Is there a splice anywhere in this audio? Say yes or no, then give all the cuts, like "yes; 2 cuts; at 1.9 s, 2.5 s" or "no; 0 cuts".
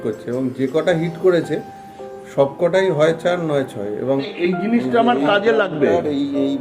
yes; 1 cut; at 4.3 s